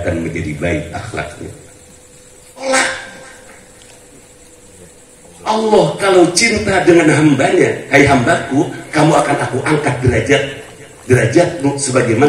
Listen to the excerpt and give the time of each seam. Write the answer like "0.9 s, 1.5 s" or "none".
2.6 s